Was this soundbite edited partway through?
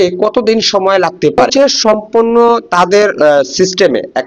yes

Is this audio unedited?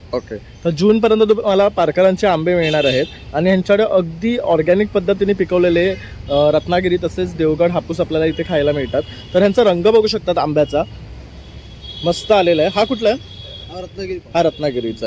yes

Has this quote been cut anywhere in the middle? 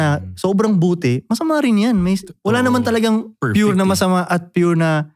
no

